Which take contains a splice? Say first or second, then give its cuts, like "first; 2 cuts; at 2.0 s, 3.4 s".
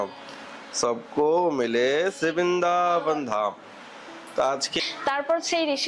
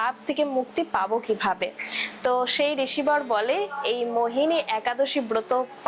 first; 1 cut; at 4.7 s